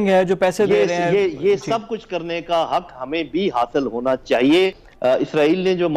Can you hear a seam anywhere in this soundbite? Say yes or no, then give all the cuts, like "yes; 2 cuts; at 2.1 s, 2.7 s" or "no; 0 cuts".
yes; 1 cut; at 4.9 s